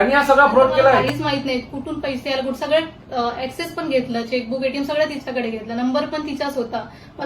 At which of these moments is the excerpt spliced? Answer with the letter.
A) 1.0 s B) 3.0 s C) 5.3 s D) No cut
A